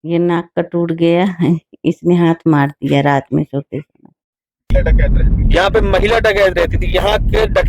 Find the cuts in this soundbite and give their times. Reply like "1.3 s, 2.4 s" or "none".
4.7 s